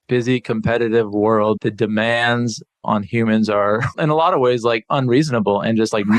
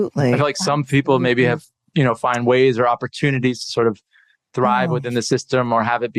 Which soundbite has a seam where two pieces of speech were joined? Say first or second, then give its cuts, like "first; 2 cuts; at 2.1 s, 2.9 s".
first; 3 cuts; at 1.6 s, 2.8 s, 3.9 s